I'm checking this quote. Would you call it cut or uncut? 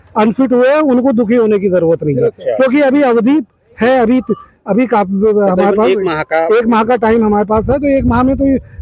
uncut